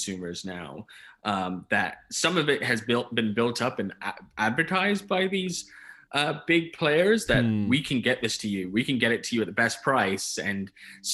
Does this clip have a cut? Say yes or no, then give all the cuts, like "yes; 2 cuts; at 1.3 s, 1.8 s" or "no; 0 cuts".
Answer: no; 0 cuts